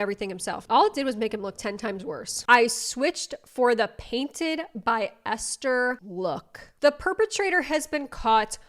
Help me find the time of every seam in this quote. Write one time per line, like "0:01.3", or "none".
0:02.4
0:06.7